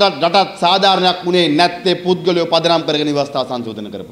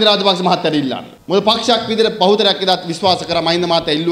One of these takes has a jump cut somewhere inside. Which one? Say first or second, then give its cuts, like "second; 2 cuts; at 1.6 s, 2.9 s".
second; 1 cut; at 1.1 s